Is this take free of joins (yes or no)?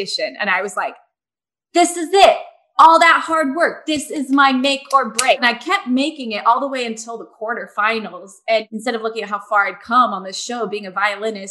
no